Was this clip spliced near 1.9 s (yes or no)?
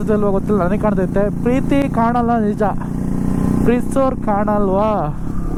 no